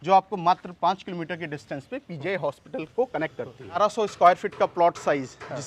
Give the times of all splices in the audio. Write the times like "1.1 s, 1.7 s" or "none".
3.6 s